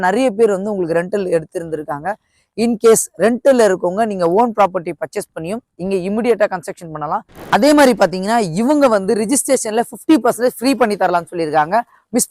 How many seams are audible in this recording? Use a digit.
1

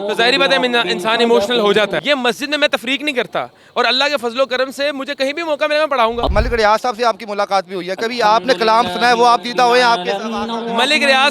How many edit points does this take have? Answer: 2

